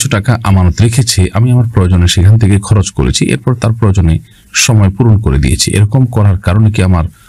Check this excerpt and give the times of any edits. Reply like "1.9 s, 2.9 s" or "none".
none